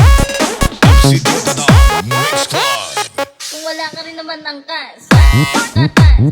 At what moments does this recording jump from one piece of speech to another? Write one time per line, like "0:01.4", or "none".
0:01.8
0:03.4
0:05.1